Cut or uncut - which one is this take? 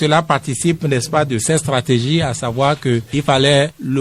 uncut